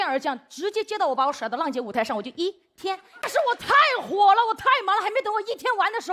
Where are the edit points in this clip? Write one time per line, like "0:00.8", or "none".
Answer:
0:03.2